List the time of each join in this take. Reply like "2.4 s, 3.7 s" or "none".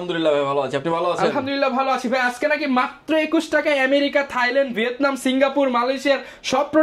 none